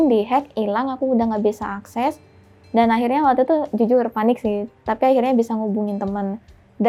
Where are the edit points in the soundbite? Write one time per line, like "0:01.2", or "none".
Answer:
none